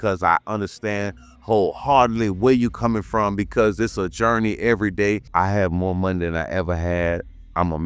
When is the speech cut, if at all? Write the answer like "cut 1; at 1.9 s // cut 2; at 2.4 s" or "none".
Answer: cut 1; at 5.2 s